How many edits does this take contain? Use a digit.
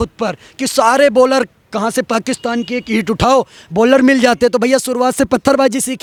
0